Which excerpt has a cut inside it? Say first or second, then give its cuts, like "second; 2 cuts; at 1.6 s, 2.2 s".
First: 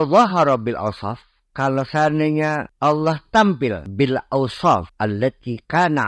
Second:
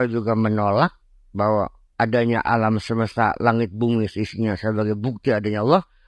first; 3 cuts; at 2.7 s, 3.8 s, 4.9 s